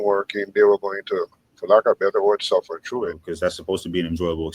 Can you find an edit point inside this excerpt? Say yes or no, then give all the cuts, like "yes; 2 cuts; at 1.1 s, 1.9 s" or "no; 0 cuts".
yes; 1 cut; at 3.2 s